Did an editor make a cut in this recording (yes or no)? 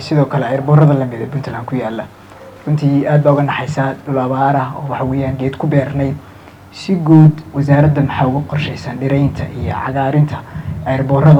no